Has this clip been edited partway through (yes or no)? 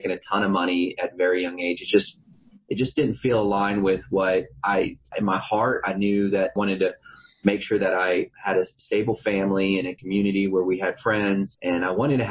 yes